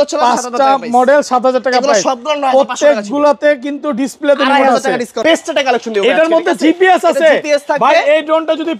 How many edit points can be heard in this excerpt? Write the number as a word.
one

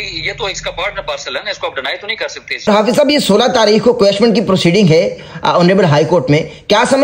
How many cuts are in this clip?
one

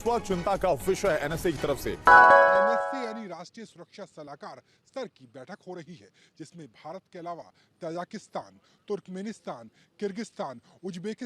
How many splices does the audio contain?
two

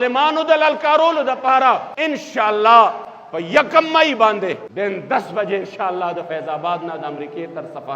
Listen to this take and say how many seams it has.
two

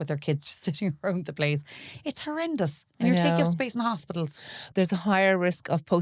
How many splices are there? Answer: one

